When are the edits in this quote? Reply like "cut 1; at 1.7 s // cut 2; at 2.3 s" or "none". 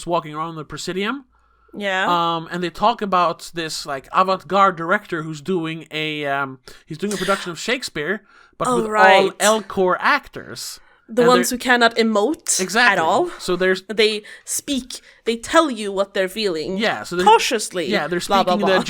none

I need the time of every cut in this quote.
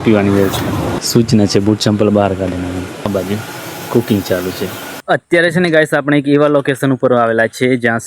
cut 1; at 1.0 s // cut 2; at 3.1 s // cut 3; at 5.0 s

